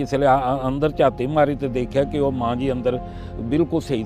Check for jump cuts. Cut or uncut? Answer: uncut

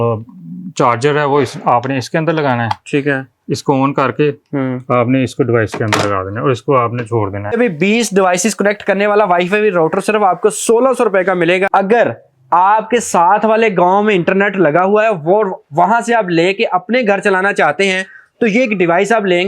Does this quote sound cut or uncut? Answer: cut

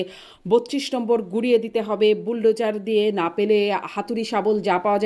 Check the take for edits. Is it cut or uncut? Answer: uncut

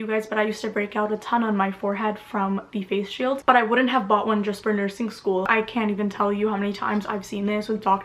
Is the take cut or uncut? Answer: cut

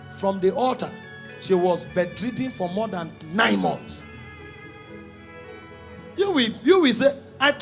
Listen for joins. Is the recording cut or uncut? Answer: uncut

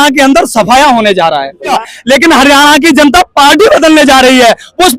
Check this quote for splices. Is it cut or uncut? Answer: cut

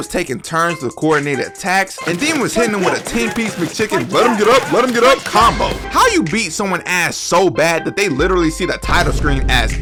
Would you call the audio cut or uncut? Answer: uncut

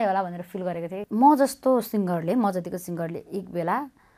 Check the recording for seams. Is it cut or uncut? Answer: cut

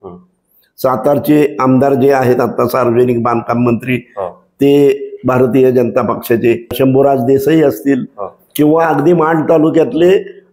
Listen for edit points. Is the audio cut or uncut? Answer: cut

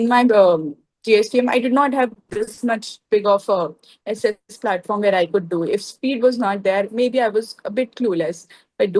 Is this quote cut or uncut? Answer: uncut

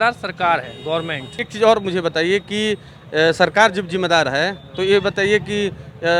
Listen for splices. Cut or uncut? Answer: uncut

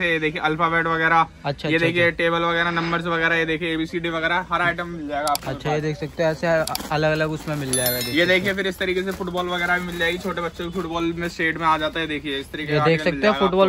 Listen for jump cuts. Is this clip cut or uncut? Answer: uncut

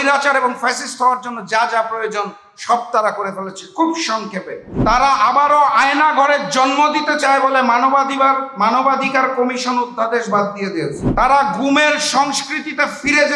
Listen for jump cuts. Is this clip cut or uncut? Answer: cut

